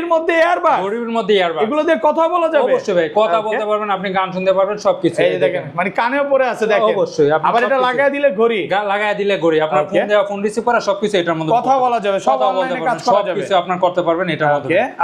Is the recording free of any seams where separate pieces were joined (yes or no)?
yes